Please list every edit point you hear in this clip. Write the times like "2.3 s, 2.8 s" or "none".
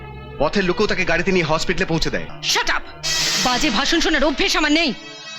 2.4 s